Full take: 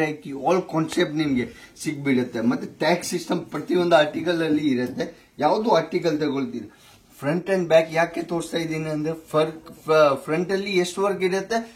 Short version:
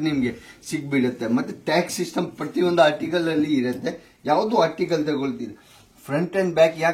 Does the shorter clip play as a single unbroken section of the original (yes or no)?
yes